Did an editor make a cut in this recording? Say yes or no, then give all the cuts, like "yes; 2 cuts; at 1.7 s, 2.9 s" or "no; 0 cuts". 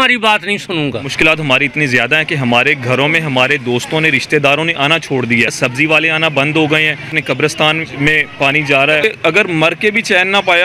yes; 4 cuts; at 1.1 s, 5.5 s, 7.2 s, 9.0 s